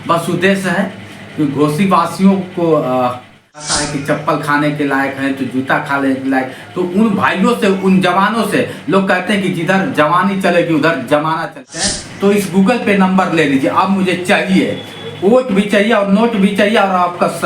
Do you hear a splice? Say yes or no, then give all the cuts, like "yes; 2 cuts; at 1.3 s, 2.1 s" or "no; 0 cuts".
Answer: yes; 2 cuts; at 3.7 s, 11.7 s